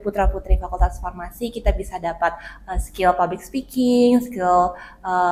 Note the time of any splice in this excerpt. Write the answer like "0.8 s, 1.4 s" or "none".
none